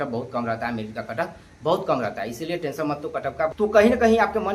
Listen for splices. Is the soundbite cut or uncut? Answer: cut